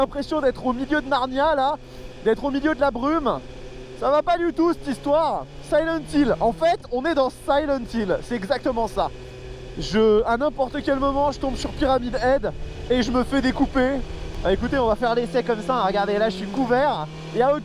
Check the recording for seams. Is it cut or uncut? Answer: uncut